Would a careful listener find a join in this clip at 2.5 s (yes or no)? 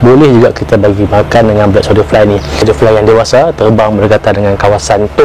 yes